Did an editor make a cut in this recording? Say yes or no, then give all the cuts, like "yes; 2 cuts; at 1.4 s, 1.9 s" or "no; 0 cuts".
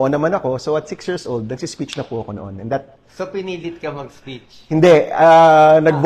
no; 0 cuts